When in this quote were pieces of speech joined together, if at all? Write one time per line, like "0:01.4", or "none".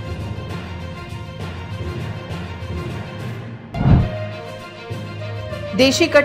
none